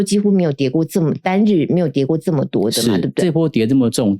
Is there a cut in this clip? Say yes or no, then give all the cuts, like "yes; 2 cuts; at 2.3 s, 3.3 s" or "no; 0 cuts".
yes; 1 cut; at 3.2 s